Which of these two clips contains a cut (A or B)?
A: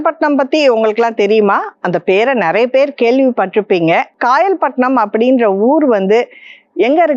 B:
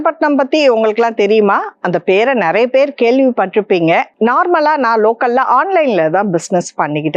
B